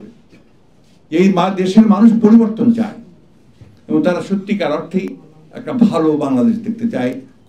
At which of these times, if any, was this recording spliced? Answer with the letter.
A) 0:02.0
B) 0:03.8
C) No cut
C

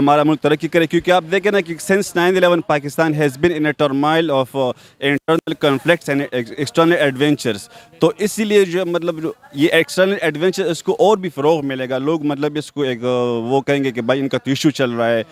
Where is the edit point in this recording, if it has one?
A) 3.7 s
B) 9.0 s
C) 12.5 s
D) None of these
D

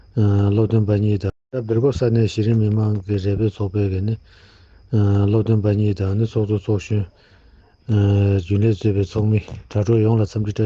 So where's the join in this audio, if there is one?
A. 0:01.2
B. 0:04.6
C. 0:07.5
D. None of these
A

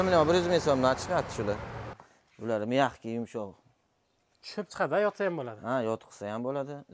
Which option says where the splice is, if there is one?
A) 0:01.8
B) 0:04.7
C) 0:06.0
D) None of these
A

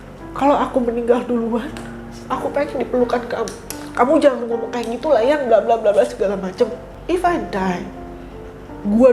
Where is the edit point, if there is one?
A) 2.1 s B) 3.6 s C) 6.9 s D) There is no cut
C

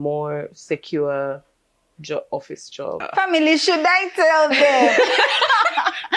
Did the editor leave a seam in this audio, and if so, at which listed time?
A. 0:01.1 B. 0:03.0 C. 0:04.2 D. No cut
B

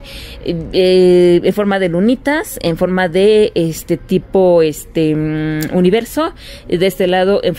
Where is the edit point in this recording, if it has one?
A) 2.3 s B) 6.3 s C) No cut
C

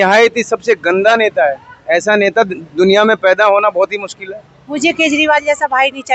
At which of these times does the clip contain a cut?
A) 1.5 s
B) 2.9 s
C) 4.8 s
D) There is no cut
C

